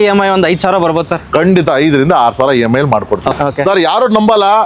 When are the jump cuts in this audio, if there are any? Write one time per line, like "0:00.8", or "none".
0:03.3